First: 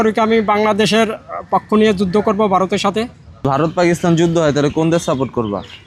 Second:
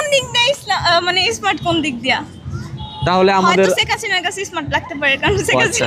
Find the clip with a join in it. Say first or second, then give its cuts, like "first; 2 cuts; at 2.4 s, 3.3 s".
first; 1 cut; at 3.2 s